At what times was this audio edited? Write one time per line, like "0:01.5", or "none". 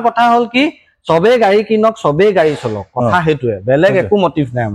none